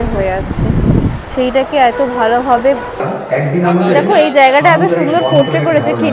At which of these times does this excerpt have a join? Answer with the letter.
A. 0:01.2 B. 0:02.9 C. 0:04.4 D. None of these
B